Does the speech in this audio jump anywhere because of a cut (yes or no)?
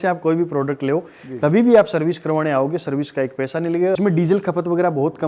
yes